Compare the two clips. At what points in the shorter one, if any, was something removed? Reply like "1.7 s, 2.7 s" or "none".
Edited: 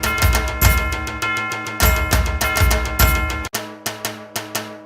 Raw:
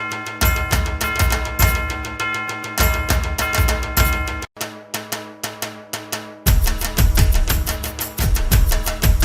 3.5 s